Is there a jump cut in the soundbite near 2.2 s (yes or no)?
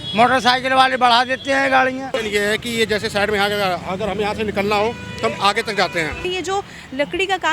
yes